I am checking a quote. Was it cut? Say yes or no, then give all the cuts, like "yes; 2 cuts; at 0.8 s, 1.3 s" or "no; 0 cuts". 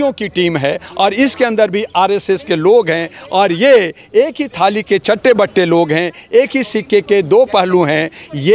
no; 0 cuts